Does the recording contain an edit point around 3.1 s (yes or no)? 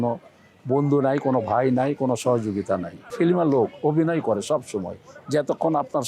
yes